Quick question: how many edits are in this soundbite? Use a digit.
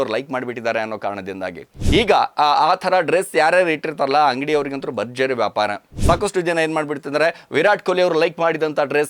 2